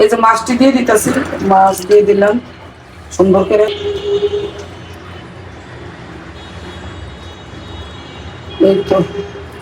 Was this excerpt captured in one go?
no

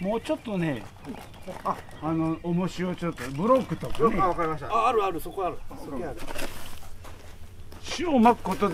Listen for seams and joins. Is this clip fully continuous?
no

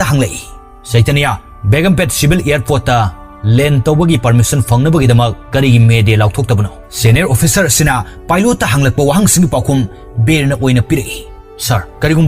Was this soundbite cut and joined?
yes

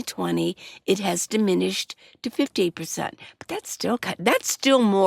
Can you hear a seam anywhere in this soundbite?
no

